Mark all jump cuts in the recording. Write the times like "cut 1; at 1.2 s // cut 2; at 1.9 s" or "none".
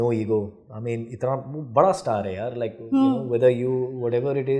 none